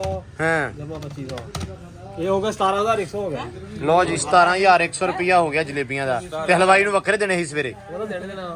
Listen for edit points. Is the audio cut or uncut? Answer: uncut